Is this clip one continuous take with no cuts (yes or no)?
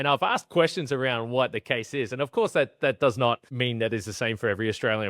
no